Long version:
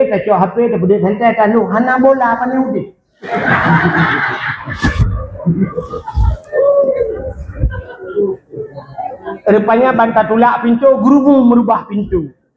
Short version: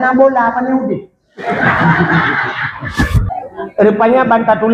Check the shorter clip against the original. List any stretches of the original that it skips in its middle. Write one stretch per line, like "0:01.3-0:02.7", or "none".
0:05.1-0:08.9